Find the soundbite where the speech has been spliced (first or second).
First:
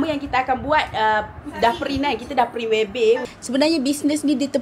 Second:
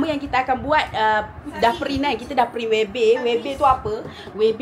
first